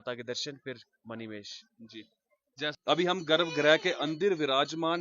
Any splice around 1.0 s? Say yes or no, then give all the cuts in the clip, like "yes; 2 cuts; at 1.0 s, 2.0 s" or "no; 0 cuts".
no; 1 cut; at 2.8 s